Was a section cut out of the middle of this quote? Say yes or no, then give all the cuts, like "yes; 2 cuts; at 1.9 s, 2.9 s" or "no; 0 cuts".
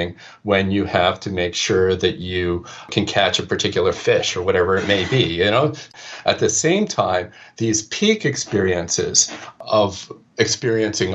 yes; 2 cuts; at 2.9 s, 5.9 s